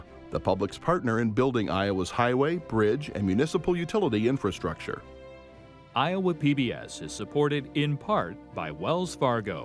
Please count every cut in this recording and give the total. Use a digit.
0